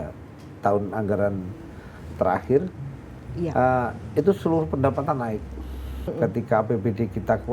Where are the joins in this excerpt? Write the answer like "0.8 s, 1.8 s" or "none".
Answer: 6.1 s